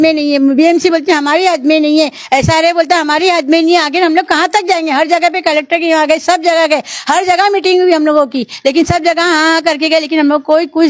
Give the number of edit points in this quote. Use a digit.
0